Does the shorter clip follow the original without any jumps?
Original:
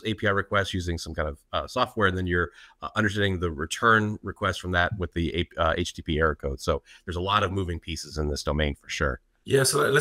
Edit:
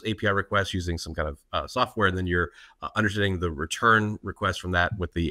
yes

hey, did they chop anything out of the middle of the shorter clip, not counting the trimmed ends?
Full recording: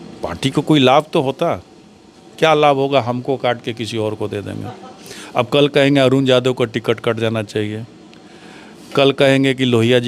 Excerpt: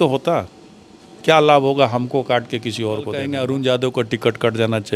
yes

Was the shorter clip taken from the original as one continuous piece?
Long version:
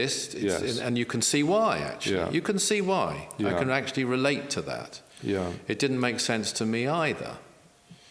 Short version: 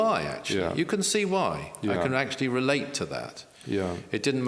yes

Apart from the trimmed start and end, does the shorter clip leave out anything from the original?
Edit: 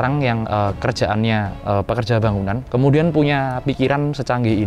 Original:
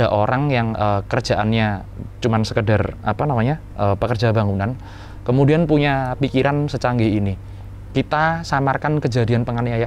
yes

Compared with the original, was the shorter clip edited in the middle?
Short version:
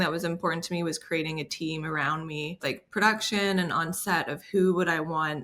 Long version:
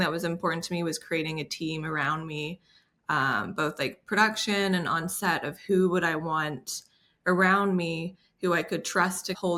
yes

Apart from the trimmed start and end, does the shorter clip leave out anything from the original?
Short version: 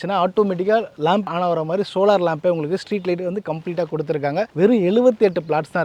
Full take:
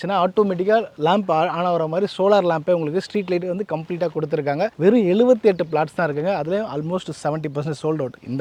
yes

